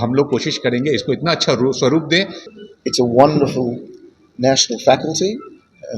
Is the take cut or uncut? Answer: cut